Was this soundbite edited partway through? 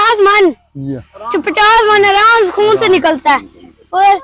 no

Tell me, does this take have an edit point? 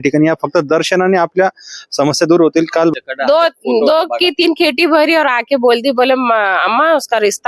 yes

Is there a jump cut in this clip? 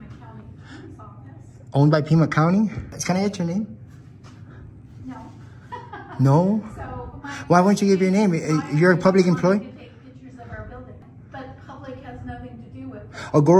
yes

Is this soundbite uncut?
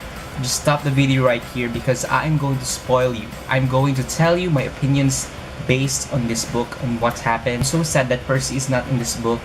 no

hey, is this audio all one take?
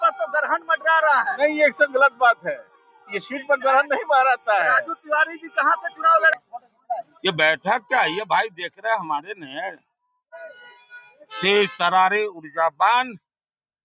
no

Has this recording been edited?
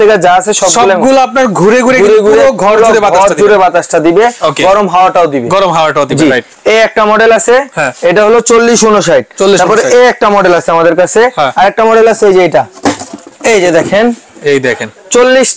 no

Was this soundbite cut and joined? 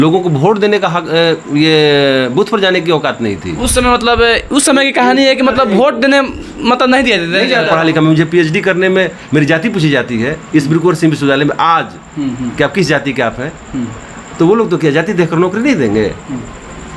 yes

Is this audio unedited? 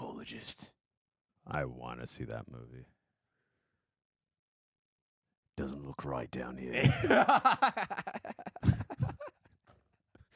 yes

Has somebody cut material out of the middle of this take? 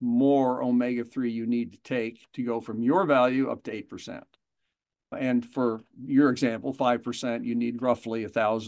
yes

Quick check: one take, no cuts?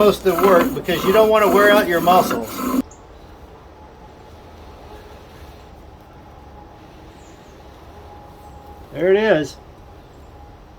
no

